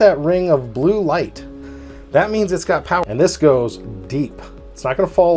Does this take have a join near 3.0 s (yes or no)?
yes